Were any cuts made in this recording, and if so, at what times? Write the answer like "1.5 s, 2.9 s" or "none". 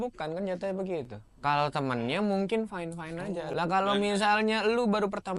3.4 s